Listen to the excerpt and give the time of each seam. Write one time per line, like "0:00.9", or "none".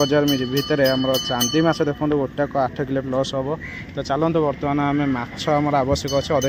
none